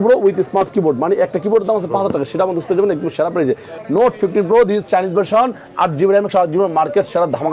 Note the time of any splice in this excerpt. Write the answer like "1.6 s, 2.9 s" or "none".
3.7 s